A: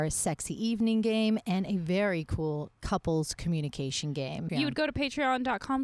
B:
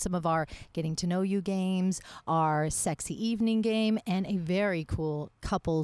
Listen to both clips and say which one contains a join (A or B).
A